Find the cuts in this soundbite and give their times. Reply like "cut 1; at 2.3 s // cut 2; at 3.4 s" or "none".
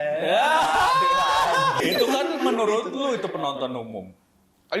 cut 1; at 1.8 s